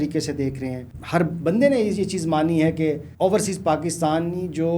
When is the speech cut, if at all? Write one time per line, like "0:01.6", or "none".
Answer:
0:00.9
0:03.1

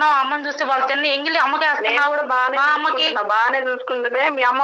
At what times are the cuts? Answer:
none

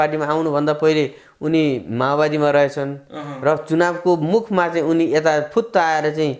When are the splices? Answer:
none

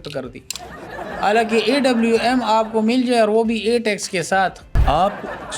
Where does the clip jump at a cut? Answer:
0:04.7

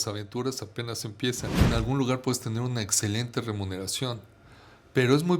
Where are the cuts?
0:01.7

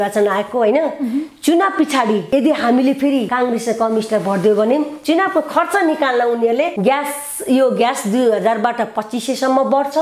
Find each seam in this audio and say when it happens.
0:02.2
0:03.3
0:06.7

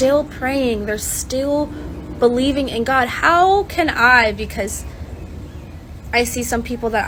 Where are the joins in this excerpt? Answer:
none

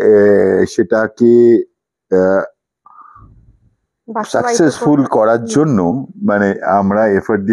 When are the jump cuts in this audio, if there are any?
none

